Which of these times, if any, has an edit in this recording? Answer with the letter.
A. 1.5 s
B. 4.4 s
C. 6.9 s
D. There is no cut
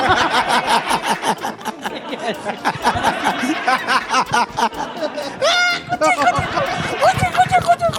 D